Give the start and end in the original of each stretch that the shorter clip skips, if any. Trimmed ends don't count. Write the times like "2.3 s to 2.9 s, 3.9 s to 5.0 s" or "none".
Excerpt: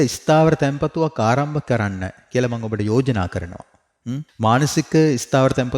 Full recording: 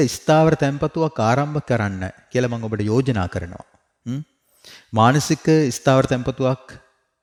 4.3 s to 4.8 s